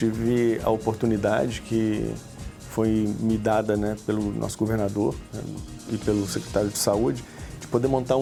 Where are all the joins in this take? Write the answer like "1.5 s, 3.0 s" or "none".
none